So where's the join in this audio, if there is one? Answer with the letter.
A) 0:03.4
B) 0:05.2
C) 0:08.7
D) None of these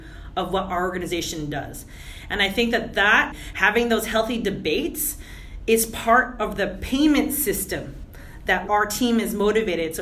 A